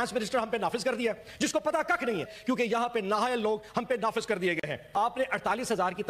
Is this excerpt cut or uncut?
cut